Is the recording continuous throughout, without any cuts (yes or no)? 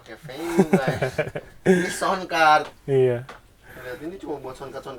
yes